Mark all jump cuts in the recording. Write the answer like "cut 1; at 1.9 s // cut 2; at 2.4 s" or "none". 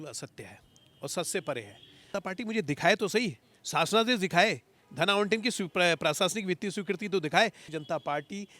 cut 1; at 2.1 s // cut 2; at 7.6 s

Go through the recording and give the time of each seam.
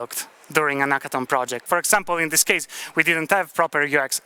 cut 1; at 1.6 s

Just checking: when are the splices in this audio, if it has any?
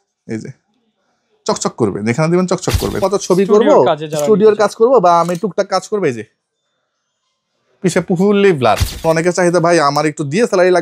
cut 1; at 3.0 s // cut 2; at 9.0 s

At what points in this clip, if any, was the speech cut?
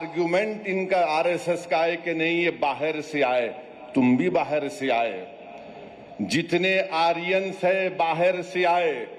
none

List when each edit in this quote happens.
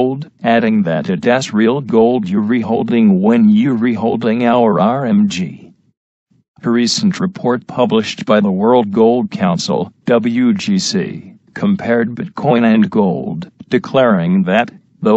cut 1; at 6.2 s

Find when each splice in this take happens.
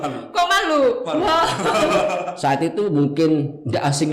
cut 1; at 2.3 s

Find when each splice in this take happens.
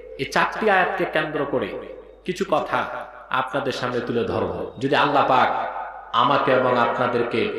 cut 1; at 4.7 s

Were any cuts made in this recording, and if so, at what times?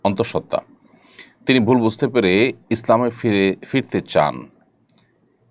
none

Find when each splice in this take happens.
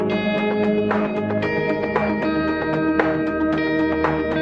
cut 1; at 2.5 s

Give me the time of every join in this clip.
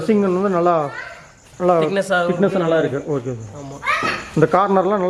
none

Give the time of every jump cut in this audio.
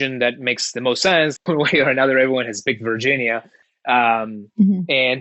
cut 1; at 1.4 s // cut 2; at 3.6 s

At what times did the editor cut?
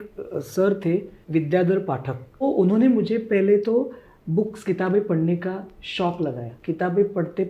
cut 1; at 1.2 s // cut 2; at 2.4 s // cut 3; at 6.5 s

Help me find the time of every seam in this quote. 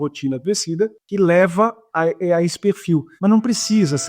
cut 1; at 1.0 s // cut 2; at 3.1 s

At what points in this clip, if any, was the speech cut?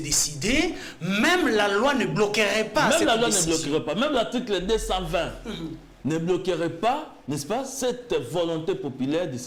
none

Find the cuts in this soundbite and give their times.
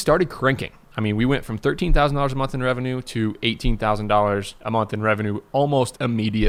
none

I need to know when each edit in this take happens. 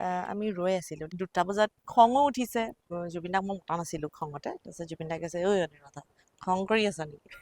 cut 1; at 1.1 s // cut 2; at 2.8 s

